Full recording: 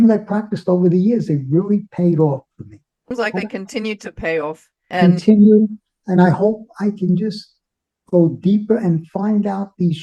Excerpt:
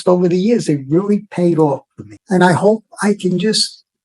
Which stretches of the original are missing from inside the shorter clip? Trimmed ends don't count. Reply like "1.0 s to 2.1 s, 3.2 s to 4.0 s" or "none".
2.7 s to 5.9 s